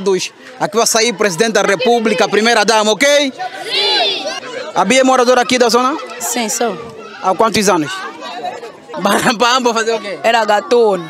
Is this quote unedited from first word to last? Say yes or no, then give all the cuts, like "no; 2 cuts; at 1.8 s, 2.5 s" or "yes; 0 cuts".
no; 2 cuts; at 4.3 s, 8.9 s